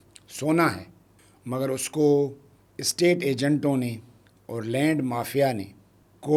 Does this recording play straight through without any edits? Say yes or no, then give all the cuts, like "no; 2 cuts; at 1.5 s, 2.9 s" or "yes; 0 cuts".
yes; 0 cuts